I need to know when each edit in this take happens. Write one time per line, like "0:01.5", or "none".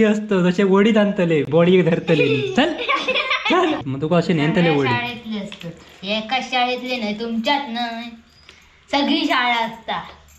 0:03.9